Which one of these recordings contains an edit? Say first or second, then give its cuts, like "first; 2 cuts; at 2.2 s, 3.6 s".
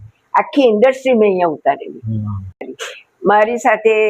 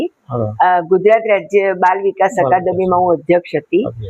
first; 1 cut; at 2.5 s